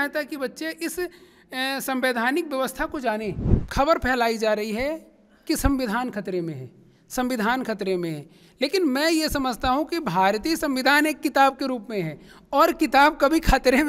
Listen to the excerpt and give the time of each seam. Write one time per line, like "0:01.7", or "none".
0:03.5